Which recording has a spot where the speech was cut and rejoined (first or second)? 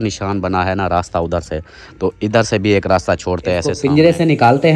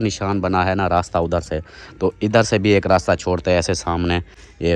first